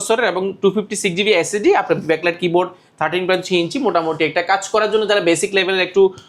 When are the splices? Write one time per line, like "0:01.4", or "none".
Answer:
none

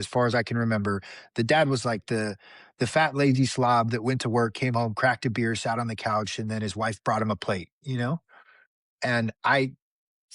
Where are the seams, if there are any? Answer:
none

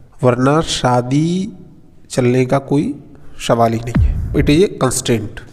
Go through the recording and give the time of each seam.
0:04.3

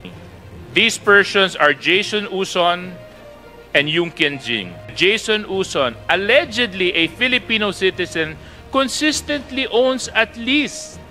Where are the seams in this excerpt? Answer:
0:04.9

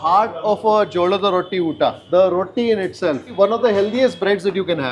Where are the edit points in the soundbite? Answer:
0:03.3

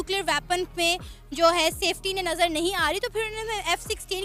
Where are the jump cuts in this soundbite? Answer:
none

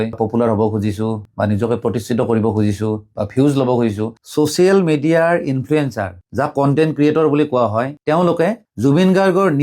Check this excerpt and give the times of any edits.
0:04.1

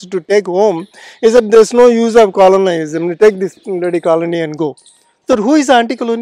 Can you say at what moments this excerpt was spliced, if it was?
none

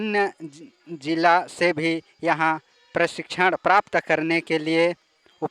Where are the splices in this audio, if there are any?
none

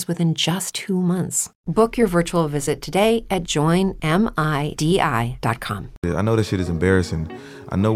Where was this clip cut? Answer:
0:06.0

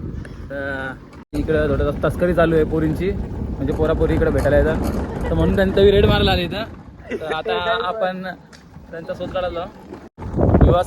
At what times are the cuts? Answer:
0:01.3
0:10.1

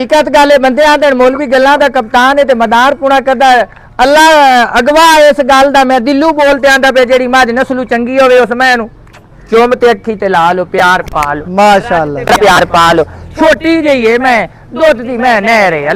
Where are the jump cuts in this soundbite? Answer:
none

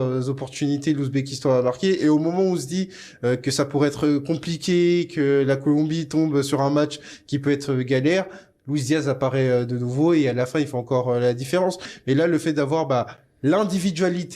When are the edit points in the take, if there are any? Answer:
0:11.9

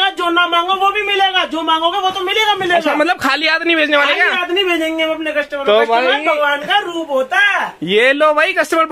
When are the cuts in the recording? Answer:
none

